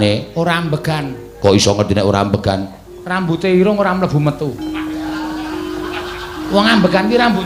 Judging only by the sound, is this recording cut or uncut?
uncut